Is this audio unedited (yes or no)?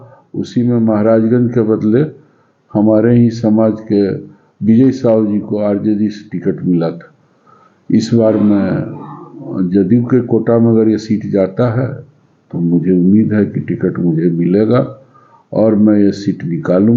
yes